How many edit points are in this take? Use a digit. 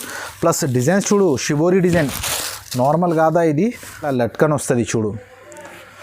1